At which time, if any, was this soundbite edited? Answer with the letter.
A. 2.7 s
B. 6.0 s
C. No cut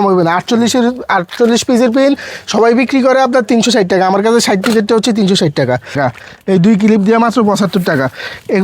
B